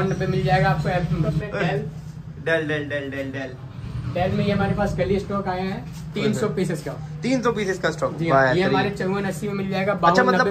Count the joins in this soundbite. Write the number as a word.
one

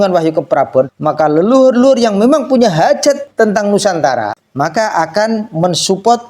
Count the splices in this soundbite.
three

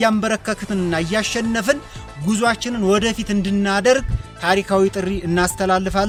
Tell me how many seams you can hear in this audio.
zero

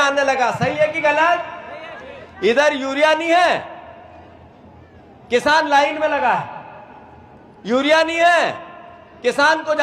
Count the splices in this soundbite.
zero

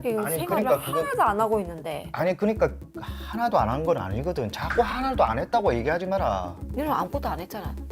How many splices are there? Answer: one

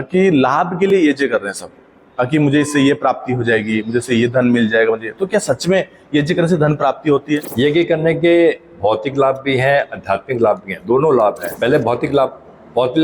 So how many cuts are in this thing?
two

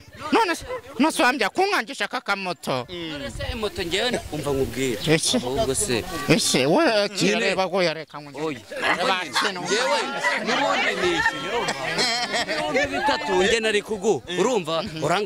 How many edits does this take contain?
zero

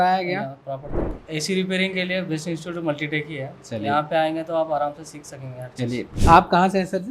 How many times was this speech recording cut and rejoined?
two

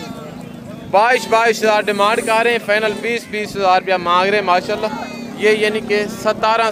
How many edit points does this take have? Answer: zero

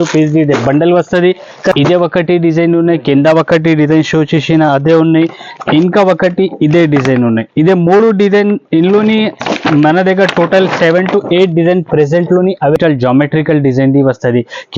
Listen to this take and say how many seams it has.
two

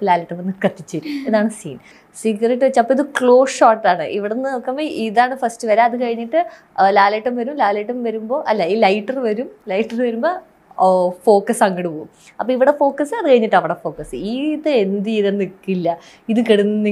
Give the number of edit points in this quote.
one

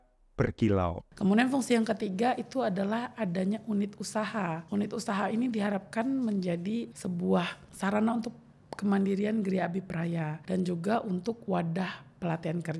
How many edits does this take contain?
two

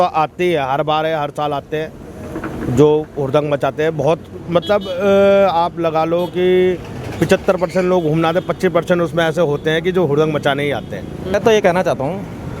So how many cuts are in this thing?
one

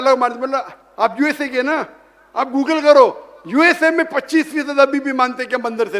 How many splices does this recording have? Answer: zero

